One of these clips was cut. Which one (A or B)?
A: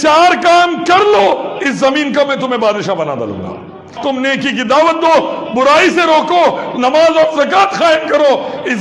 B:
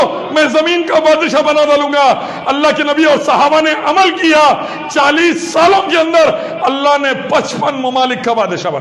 A